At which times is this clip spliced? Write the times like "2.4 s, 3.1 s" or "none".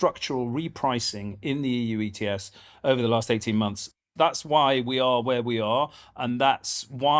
3.8 s